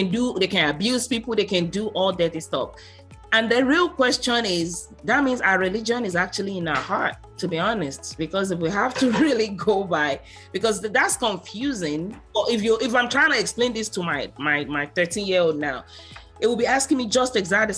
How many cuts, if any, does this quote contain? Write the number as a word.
one